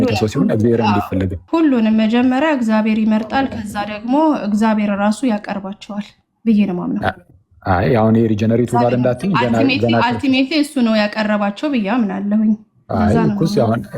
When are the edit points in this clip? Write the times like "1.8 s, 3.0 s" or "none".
1.4 s